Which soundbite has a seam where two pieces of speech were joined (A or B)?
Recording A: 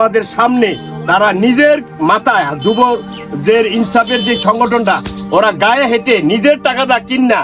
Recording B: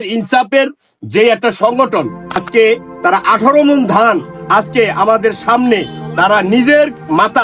B